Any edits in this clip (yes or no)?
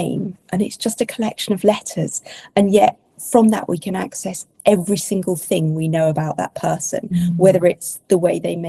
no